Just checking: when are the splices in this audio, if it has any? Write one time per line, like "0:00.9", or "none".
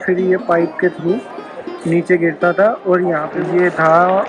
0:03.3